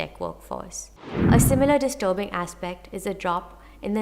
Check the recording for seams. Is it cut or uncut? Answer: cut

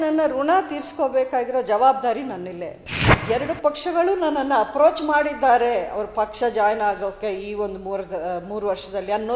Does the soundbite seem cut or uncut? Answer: cut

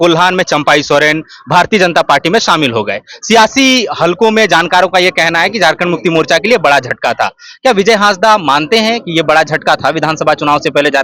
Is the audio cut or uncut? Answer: uncut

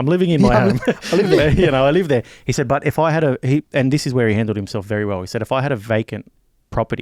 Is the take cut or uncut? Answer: uncut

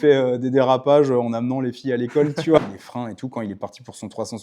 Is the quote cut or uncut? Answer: cut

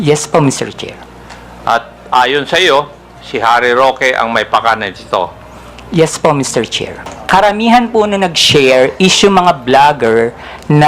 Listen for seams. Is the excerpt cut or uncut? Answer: cut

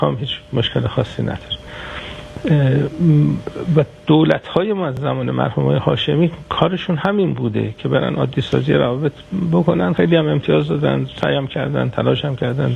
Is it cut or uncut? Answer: uncut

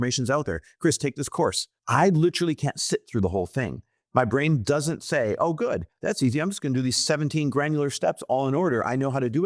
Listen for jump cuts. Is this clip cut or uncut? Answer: cut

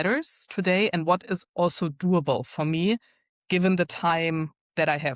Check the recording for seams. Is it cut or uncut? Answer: uncut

